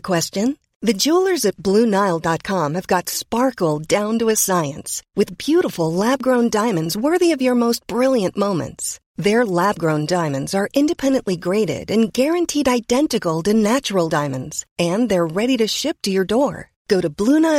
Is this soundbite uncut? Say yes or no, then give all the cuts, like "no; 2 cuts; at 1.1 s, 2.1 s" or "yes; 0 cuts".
yes; 0 cuts